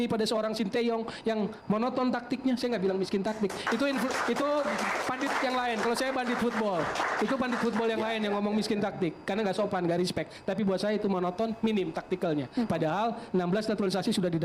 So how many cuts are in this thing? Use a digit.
0